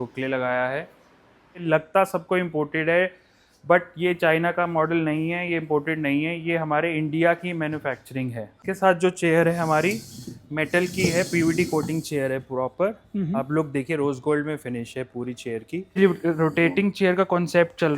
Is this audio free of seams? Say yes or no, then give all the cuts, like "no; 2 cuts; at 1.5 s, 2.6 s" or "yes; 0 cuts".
no; 3 cuts; at 1.6 s, 8.5 s, 16.0 s